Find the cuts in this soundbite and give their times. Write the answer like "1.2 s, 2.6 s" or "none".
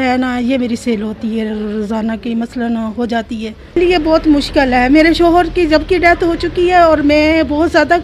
3.8 s

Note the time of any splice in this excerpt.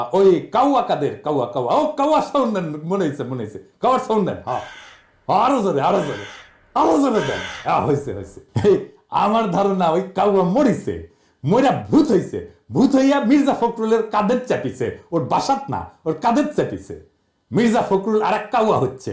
none

